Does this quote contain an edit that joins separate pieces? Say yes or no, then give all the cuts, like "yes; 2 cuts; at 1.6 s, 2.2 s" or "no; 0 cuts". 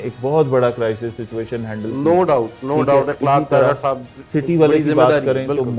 no; 0 cuts